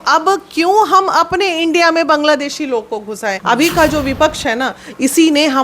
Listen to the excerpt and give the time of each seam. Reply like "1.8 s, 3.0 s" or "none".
3.3 s